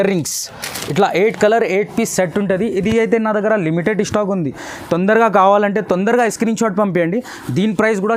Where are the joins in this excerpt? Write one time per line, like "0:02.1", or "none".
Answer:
none